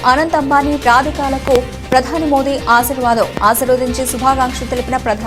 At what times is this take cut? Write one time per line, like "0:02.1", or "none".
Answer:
none

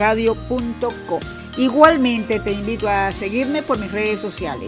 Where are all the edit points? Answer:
0:01.4

